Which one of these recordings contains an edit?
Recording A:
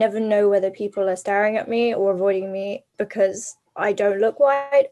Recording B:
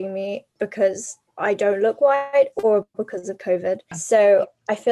B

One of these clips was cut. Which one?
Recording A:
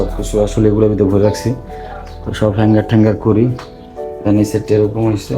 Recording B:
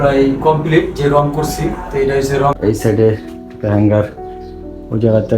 B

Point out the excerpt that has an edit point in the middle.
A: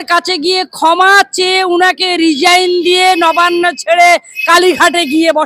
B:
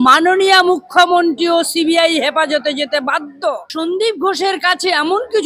B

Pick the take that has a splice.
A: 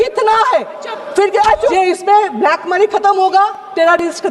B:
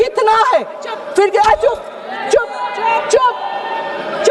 A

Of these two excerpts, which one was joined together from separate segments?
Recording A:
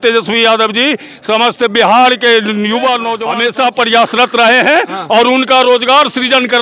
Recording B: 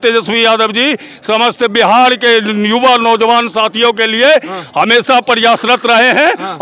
A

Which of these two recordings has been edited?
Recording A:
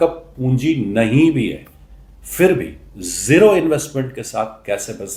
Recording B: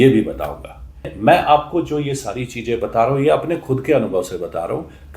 B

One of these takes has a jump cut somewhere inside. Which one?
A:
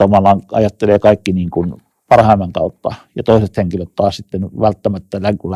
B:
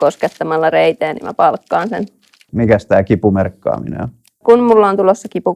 B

